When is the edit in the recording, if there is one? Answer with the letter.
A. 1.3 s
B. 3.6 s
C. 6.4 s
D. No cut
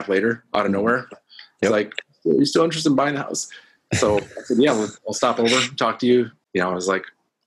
C